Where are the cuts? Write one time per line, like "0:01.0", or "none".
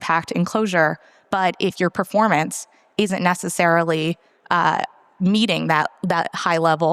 none